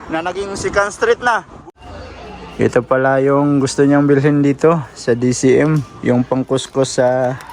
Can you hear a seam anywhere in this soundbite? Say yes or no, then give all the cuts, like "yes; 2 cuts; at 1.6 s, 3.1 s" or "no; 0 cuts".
yes; 1 cut; at 1.5 s